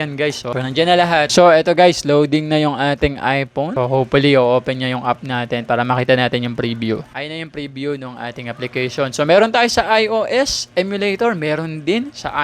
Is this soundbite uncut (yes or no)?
no